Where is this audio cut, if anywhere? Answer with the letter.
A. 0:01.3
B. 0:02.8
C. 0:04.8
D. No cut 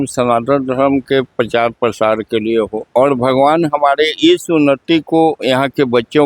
B